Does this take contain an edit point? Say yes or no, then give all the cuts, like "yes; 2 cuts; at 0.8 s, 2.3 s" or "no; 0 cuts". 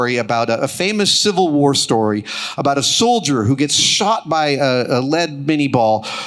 no; 0 cuts